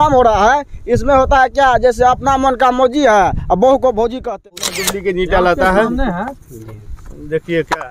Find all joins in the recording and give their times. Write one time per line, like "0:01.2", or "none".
0:04.3

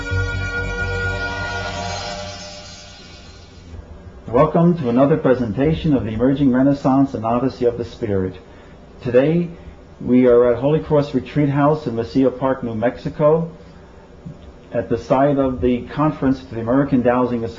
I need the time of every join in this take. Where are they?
none

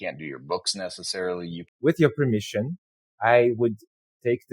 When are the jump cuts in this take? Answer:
0:01.6

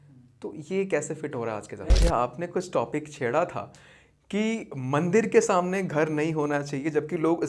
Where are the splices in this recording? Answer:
0:01.8

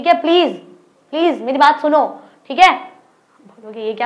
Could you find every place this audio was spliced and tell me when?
none

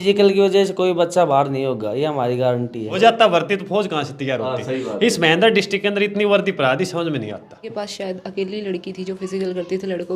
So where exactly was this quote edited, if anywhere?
0:03.0
0:07.7

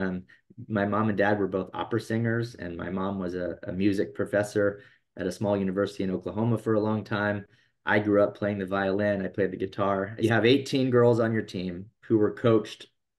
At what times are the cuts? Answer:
0:10.1

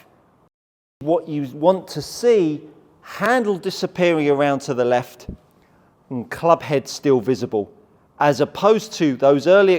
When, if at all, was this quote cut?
0:01.0

